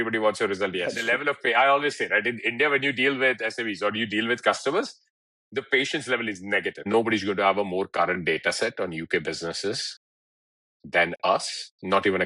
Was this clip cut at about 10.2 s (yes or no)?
no